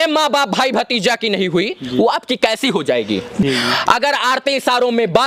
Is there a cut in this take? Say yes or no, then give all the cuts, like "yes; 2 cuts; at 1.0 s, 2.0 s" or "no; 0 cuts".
yes; 1 cut; at 3.4 s